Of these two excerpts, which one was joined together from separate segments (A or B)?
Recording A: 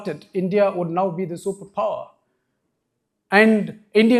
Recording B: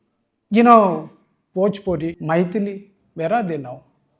B